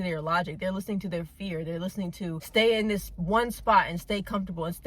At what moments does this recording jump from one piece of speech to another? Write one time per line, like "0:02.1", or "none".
none

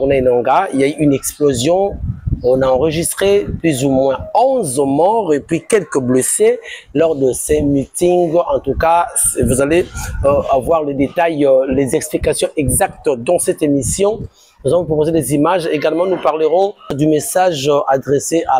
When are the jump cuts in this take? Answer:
0:17.0

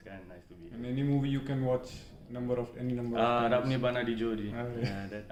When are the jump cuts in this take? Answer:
none

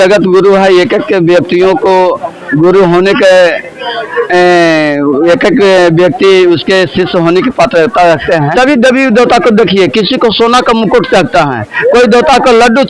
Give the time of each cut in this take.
0:08.5

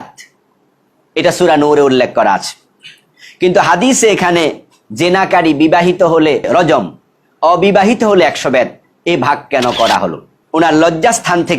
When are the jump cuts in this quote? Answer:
0:06.5
0:10.3

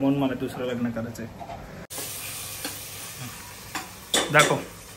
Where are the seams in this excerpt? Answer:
none

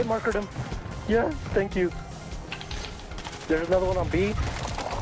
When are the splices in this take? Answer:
none

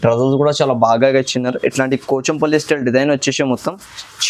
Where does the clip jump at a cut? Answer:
none

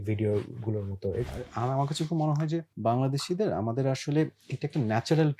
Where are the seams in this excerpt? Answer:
0:01.2
0:02.7

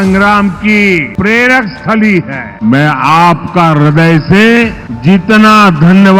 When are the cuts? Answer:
0:01.1
0:02.4
0:04.9

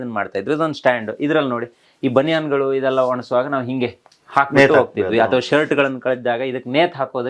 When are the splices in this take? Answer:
none

